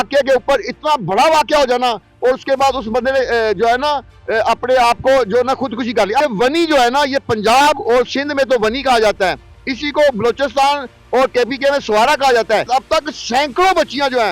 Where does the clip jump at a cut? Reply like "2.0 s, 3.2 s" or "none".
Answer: 6.2 s, 12.7 s